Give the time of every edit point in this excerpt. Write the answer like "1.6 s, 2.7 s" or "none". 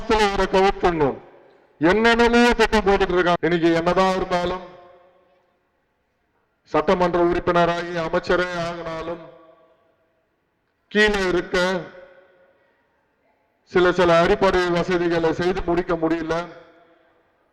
3.4 s

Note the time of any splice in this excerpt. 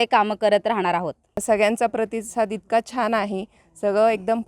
1.4 s

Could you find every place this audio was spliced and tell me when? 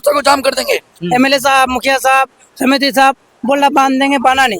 1.0 s

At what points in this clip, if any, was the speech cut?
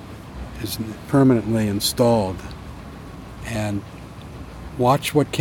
4.4 s

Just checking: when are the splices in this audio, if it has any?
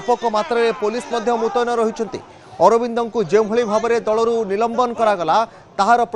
none

